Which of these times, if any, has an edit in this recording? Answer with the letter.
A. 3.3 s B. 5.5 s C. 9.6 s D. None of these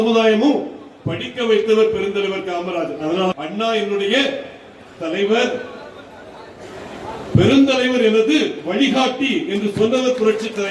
A